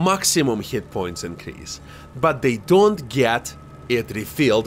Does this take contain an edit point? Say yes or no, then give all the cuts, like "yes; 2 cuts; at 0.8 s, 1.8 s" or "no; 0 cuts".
no; 0 cuts